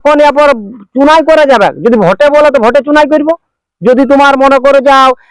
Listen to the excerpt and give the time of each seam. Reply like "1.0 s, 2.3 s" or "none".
none